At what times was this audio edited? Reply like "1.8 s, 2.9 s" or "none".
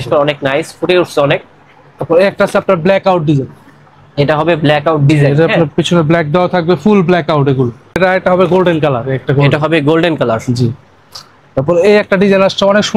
8.0 s